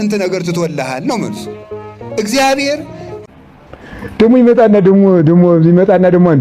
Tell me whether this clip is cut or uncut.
cut